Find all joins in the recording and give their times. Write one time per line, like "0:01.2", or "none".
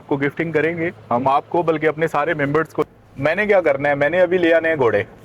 0:02.9